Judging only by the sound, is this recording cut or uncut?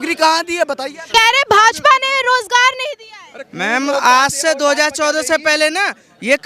cut